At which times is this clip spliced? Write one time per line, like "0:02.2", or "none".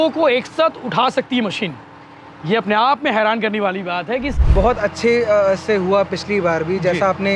0:04.4

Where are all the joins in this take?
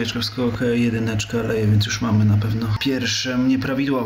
0:02.8

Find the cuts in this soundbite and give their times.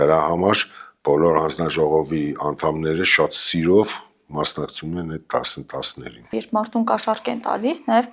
0:06.4

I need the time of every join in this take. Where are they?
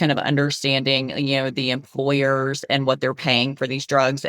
none

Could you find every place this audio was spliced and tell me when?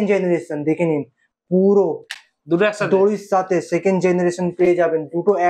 none

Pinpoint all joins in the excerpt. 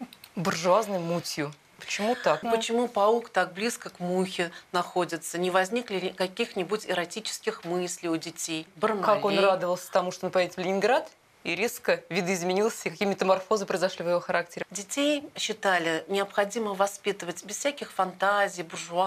0:02.4
0:08.7
0:14.6

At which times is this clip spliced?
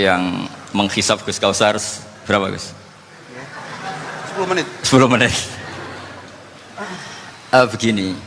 none

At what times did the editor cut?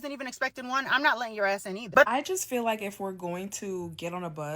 0:02.1

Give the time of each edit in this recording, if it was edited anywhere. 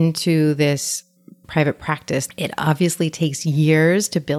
0:02.3

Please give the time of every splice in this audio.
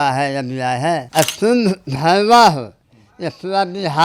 0:01.1

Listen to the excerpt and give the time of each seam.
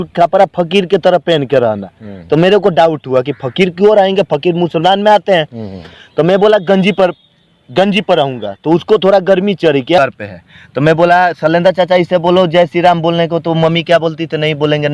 0:10.0

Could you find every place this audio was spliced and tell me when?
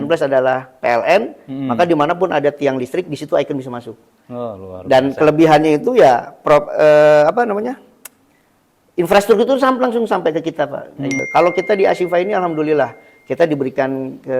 0:11.2

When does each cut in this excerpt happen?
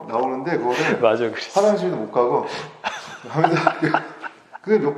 none

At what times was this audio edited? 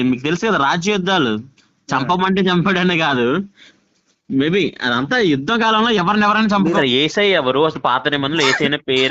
0:06.8

